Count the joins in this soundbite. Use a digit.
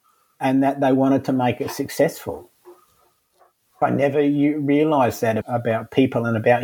2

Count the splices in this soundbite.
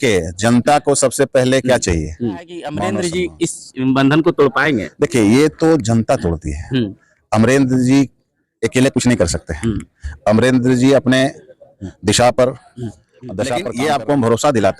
2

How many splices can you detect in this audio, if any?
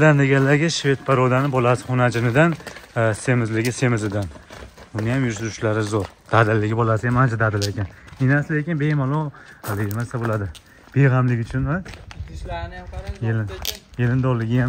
0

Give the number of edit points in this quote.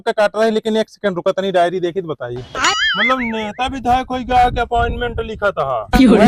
1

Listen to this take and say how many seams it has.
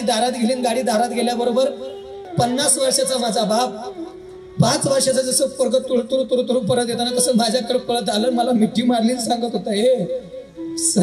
1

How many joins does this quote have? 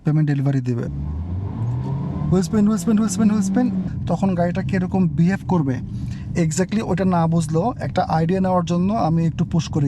2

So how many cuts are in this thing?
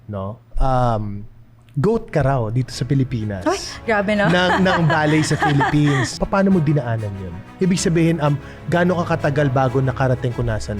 1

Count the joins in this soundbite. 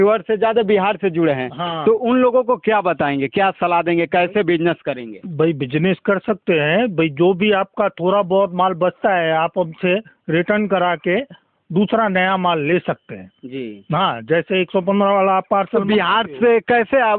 0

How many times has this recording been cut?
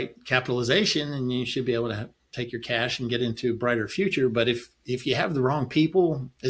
0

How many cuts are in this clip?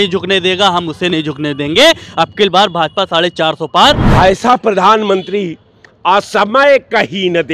1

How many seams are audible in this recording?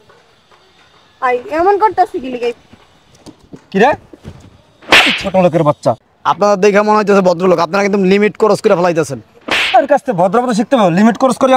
1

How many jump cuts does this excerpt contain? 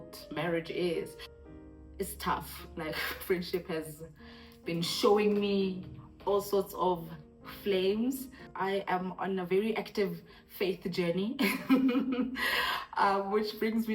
2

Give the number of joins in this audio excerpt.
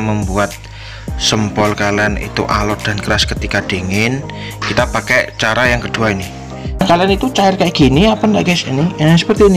1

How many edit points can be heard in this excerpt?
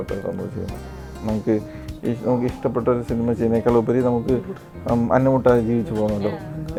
0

